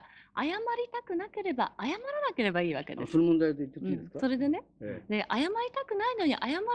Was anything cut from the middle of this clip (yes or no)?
no